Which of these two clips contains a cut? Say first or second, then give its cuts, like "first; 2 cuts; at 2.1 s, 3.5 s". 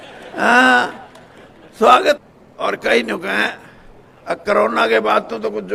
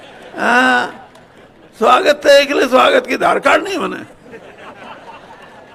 first; 1 cut; at 2.2 s